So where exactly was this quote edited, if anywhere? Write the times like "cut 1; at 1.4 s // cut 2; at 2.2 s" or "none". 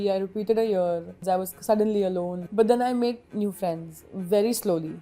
cut 1; at 1.1 s